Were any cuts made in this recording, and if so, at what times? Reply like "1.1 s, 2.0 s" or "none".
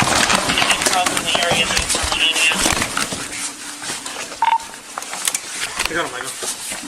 none